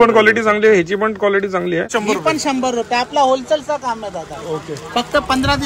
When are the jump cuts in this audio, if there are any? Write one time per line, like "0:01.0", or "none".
0:01.9